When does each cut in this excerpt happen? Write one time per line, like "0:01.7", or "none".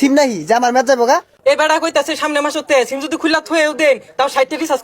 0:01.3